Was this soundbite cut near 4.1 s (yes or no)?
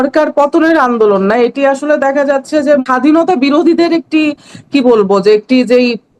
no